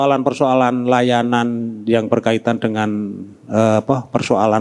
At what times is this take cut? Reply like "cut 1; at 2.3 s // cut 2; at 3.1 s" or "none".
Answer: none